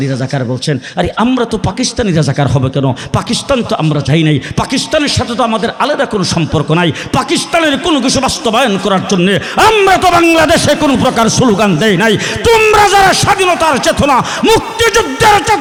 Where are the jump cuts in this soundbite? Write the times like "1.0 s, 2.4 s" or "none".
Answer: none